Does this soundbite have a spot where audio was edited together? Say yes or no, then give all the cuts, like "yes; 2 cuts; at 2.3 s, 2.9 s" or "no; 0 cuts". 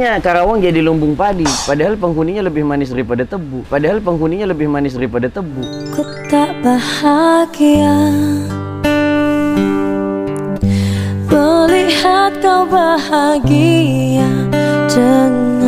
no; 0 cuts